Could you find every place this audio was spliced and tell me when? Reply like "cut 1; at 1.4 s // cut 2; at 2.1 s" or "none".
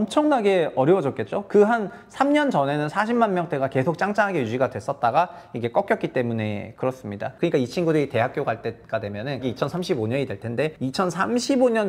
cut 1; at 7.2 s // cut 2; at 9.4 s // cut 3; at 10.8 s